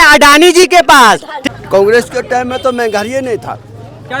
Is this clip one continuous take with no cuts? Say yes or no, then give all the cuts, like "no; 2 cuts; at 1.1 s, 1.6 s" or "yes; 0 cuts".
no; 1 cut; at 1.3 s